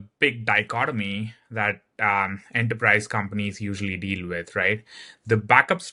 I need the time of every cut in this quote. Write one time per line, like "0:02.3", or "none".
none